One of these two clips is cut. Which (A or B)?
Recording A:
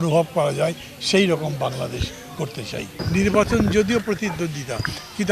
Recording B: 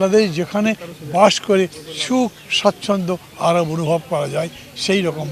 A